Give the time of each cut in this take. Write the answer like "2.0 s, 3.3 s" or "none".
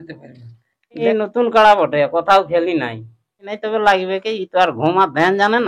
1.0 s, 3.5 s